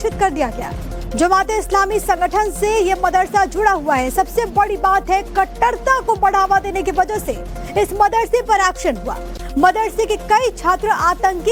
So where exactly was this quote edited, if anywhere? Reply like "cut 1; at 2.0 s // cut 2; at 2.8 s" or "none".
none